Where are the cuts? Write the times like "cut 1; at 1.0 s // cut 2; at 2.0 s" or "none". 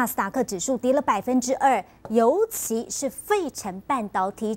cut 1; at 0.9 s // cut 2; at 2.3 s

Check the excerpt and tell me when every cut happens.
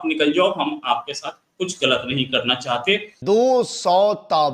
cut 1; at 3.2 s

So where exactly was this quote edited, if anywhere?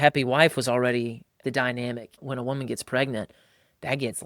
cut 1; at 1.4 s // cut 2; at 2.2 s

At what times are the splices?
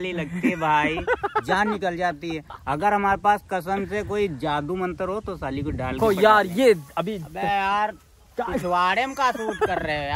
cut 1; at 6.0 s

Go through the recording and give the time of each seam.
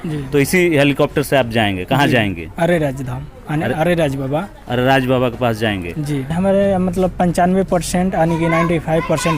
cut 1; at 6.3 s

